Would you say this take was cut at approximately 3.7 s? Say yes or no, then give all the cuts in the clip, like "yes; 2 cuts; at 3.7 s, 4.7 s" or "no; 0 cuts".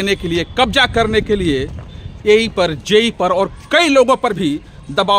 no; 0 cuts